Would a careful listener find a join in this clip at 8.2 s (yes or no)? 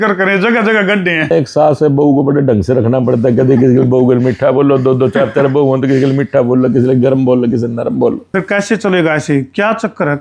yes